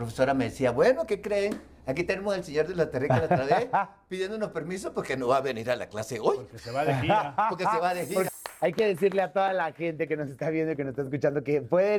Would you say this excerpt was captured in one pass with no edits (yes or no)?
no